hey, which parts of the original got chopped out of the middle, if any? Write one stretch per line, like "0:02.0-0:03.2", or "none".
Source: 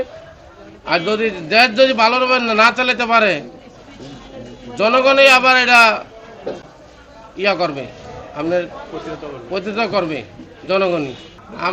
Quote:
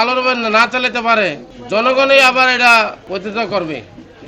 0:03.6-0:04.6
0:06.1-0:09.4